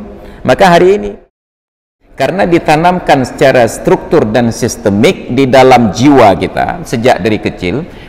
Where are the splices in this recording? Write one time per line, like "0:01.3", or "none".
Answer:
0:01.8